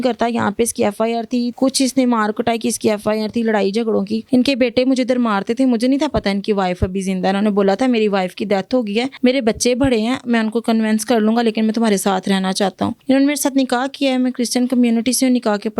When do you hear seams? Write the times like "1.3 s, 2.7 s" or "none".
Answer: 1.5 s, 4.2 s, 9.1 s, 13.0 s